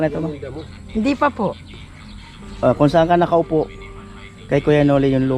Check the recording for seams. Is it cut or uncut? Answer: uncut